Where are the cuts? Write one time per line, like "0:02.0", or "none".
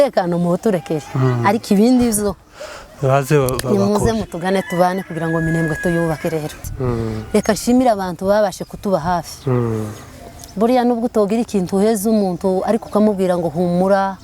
0:06.6